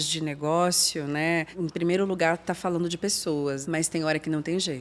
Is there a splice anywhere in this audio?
yes; 2 cuts; at 1.5 s, 3.6 s

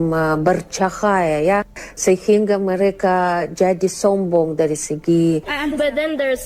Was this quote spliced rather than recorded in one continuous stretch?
yes; 1 cut; at 5.5 s

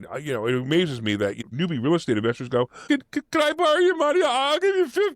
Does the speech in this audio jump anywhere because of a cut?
yes; 2 cuts; at 1.4 s, 2.8 s

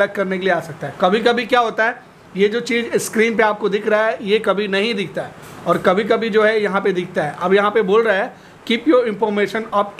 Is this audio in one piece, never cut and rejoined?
yes; 0 cuts

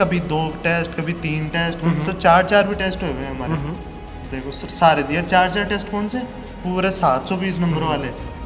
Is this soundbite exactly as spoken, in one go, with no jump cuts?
yes; 0 cuts

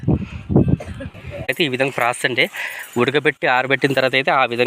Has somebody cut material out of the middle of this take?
yes; 1 cut; at 1.5 s

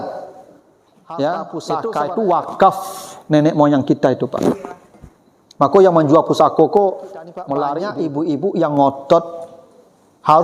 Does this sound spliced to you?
yes; 2 cuts; at 1.7 s, 7.8 s

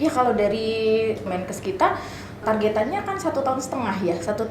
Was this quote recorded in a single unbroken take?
no; 2 cuts; at 1.3 s, 2.4 s

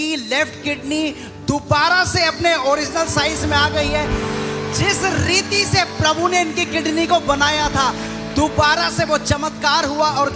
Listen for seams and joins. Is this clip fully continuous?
yes; 0 cuts

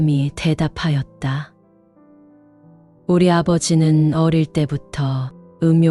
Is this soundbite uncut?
yes; 0 cuts

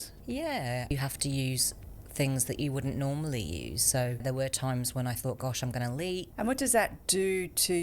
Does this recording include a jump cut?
yes; 4 cuts; at 0.9 s, 4.2 s, 6.3 s, 7.0 s

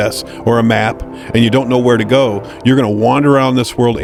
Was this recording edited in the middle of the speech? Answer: no; 0 cuts

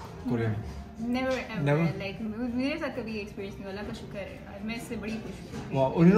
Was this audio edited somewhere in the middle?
no; 0 cuts

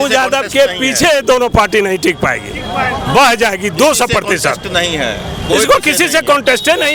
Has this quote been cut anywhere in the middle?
no; 0 cuts

